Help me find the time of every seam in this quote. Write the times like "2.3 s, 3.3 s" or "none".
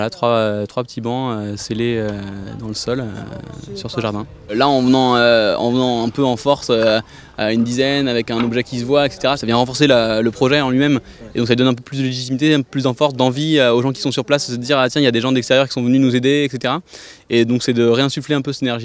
12.5 s